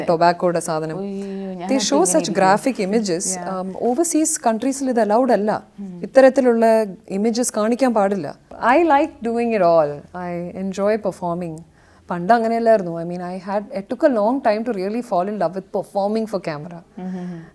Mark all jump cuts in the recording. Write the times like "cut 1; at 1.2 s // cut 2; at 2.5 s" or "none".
cut 1; at 8.5 s